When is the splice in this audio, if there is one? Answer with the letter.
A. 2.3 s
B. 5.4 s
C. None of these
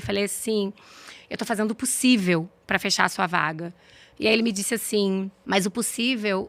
B